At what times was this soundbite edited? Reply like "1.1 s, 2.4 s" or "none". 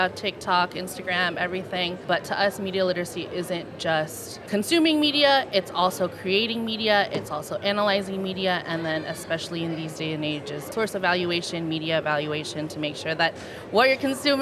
2.0 s, 4.3 s, 10.7 s